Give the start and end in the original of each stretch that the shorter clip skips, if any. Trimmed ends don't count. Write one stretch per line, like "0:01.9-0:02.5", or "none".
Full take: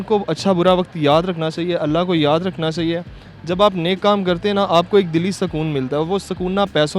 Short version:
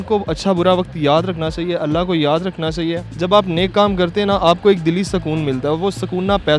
0:03.1-0:03.4